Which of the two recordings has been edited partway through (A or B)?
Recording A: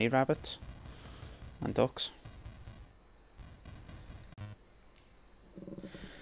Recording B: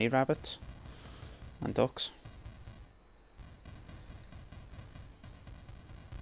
B